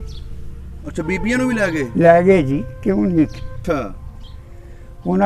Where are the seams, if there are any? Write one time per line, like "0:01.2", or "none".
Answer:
0:03.5